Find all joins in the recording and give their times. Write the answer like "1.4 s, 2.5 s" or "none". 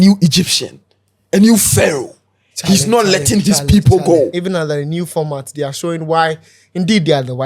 4.4 s